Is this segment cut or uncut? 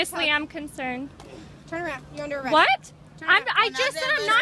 uncut